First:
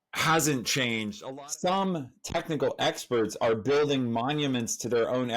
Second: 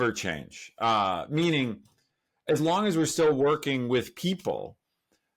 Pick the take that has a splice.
first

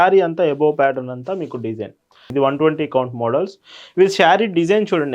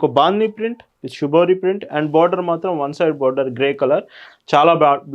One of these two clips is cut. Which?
first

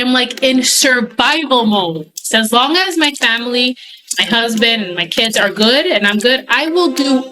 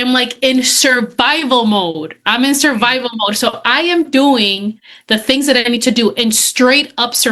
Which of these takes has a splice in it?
first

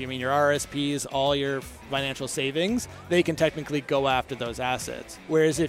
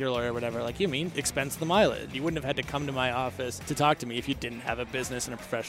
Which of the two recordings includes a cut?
second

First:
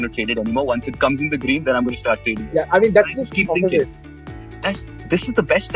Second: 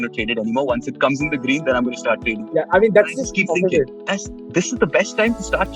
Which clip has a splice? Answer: second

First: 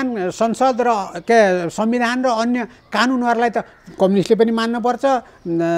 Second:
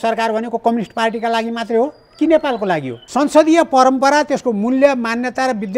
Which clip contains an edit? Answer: second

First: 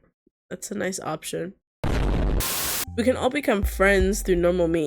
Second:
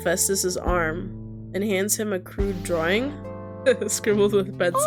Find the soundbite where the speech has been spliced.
first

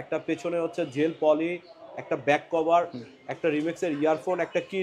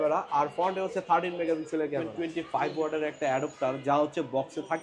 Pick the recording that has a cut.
second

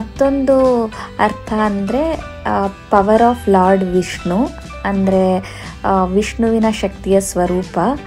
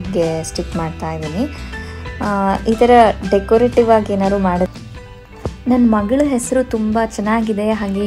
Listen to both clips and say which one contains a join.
second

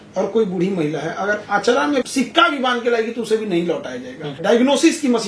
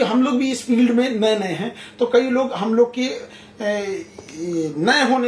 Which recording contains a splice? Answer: first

